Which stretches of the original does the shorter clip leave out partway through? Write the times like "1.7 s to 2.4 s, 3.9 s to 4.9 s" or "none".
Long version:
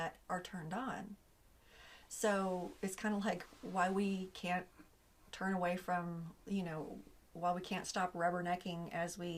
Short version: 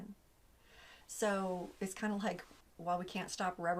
3.5 s to 7.1 s

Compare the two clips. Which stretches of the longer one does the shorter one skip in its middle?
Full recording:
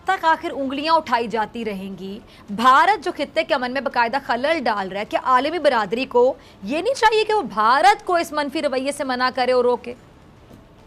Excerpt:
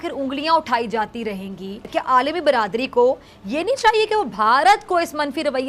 2.2 s to 5.0 s

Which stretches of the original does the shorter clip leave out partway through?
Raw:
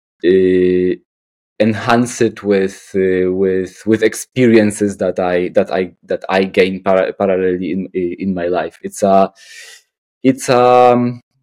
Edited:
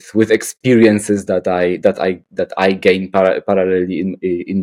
none

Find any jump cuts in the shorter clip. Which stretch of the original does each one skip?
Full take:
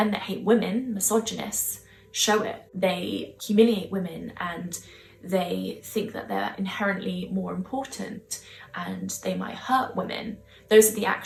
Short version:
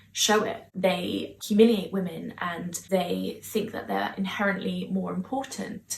4.7 s to 5.1 s

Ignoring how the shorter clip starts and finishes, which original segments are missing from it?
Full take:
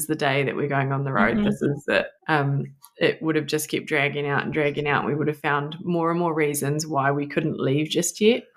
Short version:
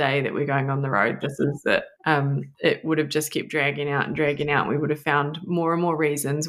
2.7 s to 2.8 s

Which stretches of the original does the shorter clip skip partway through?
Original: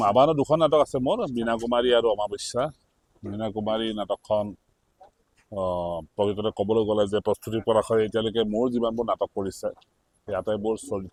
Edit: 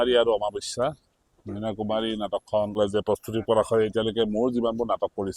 4.5 s to 7.0 s

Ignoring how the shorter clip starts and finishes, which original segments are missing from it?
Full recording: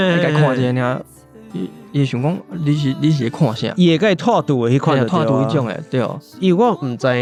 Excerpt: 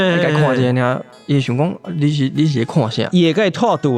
1.1 s to 1.8 s

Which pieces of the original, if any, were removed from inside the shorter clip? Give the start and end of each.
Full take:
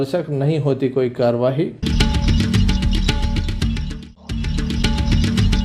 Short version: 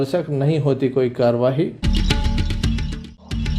1.8 s to 2.8 s

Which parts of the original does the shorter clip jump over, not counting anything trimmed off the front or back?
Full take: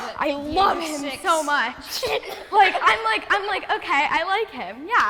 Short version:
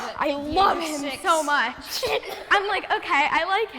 2.4 s to 3.2 s

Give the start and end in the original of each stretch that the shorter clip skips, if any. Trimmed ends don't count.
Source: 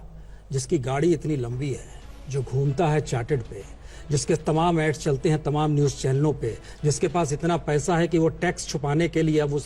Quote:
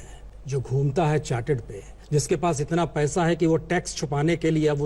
3.8 s to 6.7 s

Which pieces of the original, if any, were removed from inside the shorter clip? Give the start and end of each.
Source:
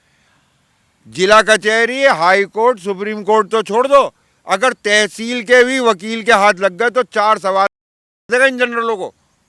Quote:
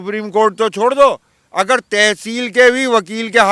none

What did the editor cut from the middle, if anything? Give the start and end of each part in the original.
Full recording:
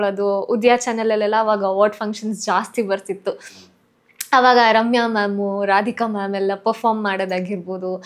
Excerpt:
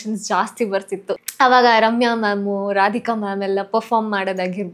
3.4 s to 4.2 s

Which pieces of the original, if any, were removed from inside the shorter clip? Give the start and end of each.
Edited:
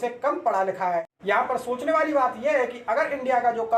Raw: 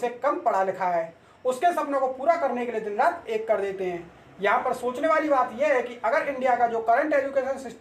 1.1 s to 4.3 s

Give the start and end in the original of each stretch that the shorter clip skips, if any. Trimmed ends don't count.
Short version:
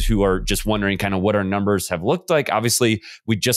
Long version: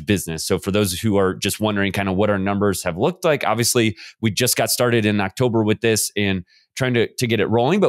none

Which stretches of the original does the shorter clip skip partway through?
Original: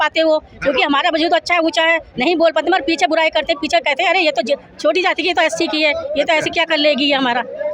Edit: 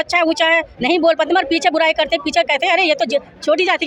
none

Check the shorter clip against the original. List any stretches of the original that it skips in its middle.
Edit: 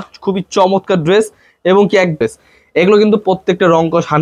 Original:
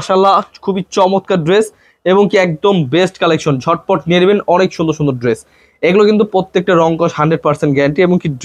2.6 s to 5.2 s

